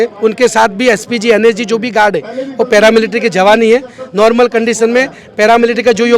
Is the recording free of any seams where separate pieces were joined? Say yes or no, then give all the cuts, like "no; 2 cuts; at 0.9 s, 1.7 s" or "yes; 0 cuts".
yes; 0 cuts